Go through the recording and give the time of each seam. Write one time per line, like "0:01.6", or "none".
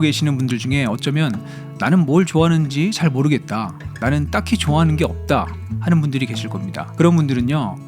0:06.8

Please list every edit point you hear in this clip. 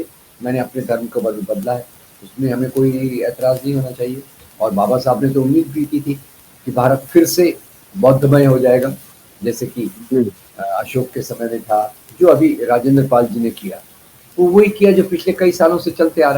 0:12.0

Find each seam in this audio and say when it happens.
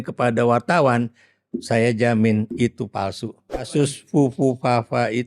0:03.7

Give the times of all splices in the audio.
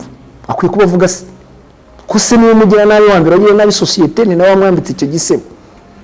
none

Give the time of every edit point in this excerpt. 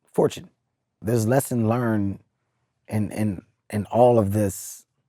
0:01.0

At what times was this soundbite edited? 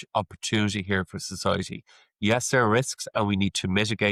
none

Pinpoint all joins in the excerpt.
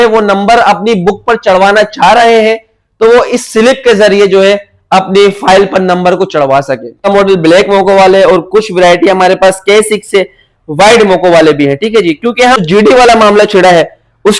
0:07.1
0:12.6

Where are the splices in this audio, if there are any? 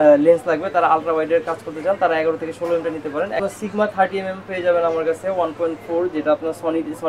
0:03.5

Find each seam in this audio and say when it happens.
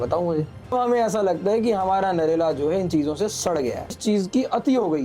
0:00.7
0:04.0

